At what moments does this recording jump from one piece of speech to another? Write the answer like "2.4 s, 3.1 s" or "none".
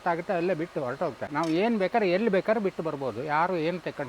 1.2 s